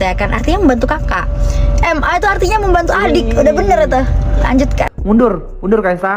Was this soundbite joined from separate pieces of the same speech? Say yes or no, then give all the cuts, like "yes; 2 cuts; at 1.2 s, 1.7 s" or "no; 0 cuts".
yes; 1 cut; at 5.0 s